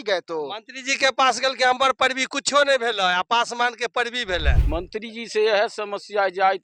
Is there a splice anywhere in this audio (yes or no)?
yes